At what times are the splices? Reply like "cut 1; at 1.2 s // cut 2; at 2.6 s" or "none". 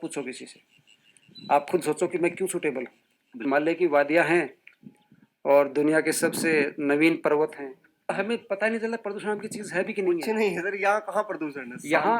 cut 1; at 3.4 s // cut 2; at 8.1 s